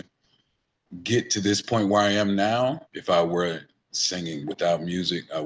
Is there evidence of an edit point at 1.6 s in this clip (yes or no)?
no